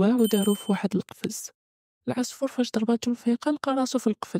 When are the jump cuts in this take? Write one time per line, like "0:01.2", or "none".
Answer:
none